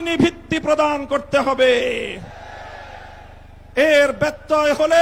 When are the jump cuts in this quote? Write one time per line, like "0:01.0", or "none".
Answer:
none